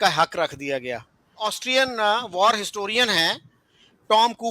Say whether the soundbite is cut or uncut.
cut